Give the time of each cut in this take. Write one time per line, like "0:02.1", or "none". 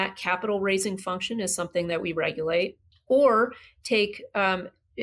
0:02.9